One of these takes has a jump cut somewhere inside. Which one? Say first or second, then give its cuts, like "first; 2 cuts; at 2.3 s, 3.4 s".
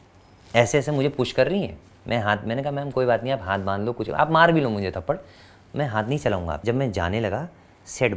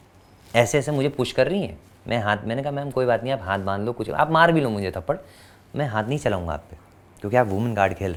first; 1 cut; at 6.6 s